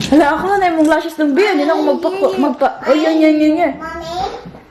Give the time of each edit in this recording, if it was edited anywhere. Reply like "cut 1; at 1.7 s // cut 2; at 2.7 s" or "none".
none

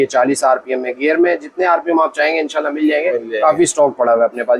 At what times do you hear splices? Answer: none

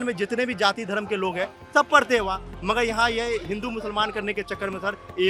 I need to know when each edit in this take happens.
none

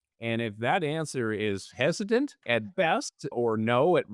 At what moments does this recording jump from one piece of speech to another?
cut 1; at 2.4 s

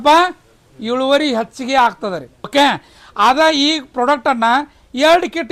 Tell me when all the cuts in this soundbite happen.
none

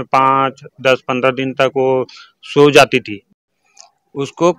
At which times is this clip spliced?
cut 1; at 3.4 s

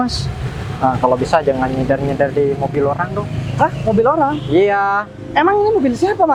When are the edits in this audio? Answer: none

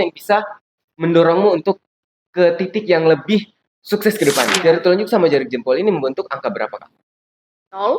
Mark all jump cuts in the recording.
cut 1; at 4.5 s

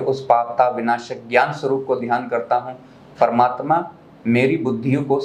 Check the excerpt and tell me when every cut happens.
none

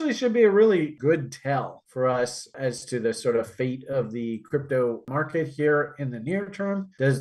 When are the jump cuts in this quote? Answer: cut 1; at 0.9 s // cut 2; at 2.5 s // cut 3; at 5.1 s

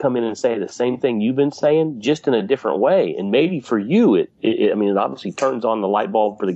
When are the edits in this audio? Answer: none

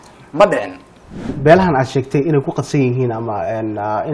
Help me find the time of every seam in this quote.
cut 1; at 1.3 s

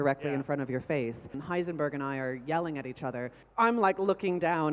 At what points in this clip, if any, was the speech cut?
cut 1; at 1.4 s // cut 2; at 3.4 s

